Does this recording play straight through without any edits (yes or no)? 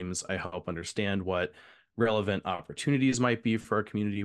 yes